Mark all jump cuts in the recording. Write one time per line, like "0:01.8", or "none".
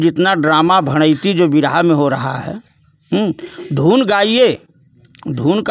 none